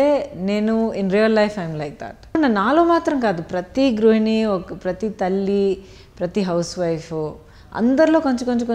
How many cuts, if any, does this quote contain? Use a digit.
1